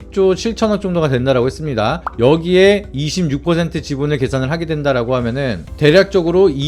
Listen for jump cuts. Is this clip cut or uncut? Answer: uncut